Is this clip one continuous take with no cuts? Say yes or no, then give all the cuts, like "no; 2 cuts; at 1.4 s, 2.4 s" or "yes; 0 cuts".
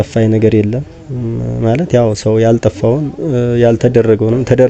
yes; 0 cuts